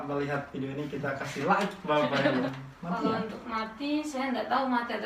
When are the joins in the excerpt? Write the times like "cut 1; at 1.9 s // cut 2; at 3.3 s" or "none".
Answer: cut 1; at 2.5 s

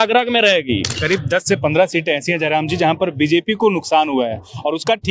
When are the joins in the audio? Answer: cut 1; at 0.9 s

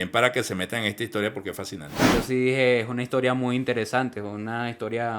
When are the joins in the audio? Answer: cut 1; at 1.9 s

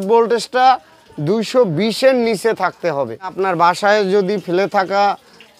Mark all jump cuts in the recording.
cut 1; at 3.3 s

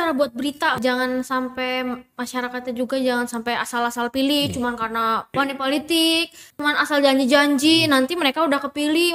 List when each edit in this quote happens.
cut 1; at 0.8 s // cut 2; at 5.4 s // cut 3; at 6.5 s

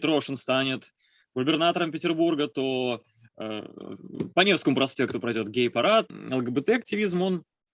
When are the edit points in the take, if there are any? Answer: cut 1; at 6.1 s

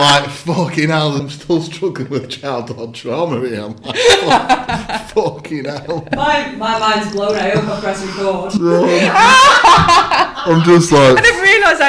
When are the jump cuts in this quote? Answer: cut 1; at 1.3 s

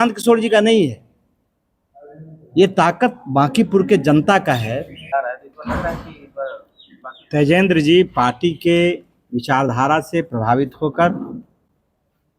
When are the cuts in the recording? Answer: cut 1; at 5.0 s

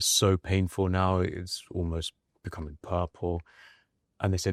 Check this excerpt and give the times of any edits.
none

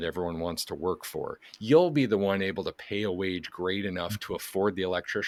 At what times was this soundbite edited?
none

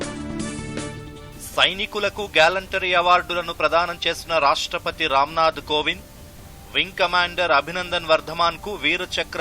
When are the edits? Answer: cut 1; at 1.2 s

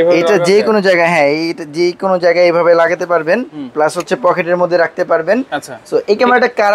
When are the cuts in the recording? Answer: none

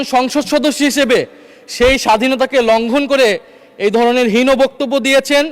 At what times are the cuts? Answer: none

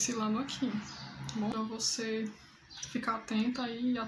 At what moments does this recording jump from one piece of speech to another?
cut 1; at 1.5 s

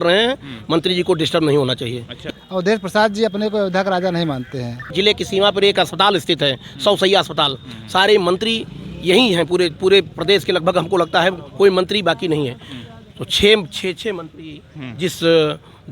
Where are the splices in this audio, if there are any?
cut 1; at 2.2 s // cut 2; at 4.9 s

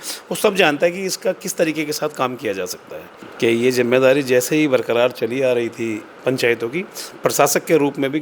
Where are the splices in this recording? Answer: cut 1; at 3.1 s

